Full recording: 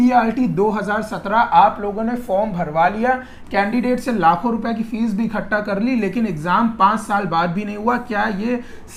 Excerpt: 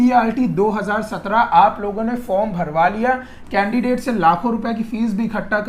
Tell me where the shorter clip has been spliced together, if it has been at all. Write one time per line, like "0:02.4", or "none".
none